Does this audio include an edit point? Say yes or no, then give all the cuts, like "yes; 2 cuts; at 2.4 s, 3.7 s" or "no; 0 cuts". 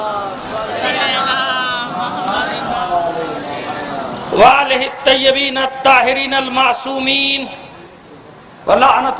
yes; 1 cut; at 4.4 s